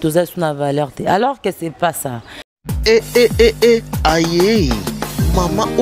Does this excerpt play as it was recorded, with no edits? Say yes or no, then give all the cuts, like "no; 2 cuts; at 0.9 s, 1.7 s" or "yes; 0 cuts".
no; 1 cut; at 2.4 s